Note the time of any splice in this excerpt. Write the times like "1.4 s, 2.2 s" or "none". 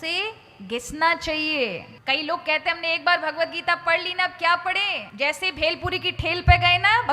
1.9 s, 5.0 s